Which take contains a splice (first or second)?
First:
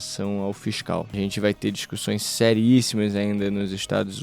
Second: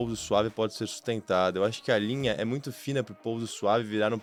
first